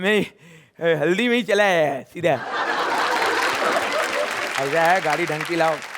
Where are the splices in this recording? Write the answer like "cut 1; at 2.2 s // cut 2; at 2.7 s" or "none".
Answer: cut 1; at 2.6 s